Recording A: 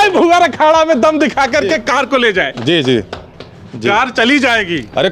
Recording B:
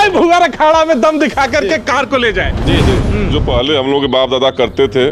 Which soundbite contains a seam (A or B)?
B